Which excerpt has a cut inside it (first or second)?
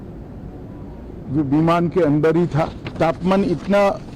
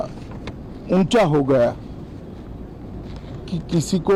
first